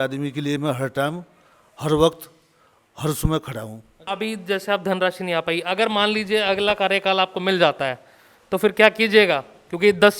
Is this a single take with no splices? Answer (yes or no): no